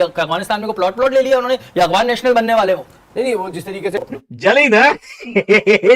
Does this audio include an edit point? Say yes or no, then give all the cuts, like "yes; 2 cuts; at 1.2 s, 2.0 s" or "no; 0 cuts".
yes; 1 cut; at 4.0 s